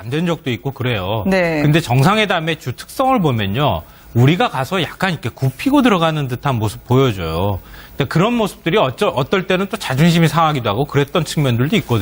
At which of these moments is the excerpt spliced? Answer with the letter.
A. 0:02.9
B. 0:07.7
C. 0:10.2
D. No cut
B